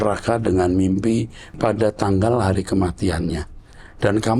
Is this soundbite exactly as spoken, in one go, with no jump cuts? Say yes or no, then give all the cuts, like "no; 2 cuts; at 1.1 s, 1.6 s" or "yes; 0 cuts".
no; 1 cut; at 1.6 s